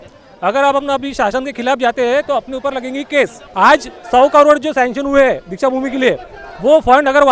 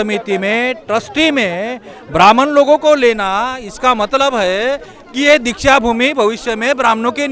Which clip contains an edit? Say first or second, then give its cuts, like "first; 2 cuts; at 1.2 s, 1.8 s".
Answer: first; 1 cut; at 3.4 s